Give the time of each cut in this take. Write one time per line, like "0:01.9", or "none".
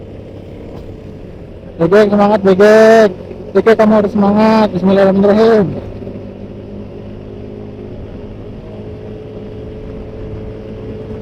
none